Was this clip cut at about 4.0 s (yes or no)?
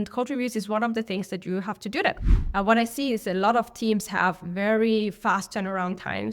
no